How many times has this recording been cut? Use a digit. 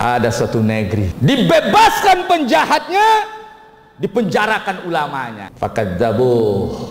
2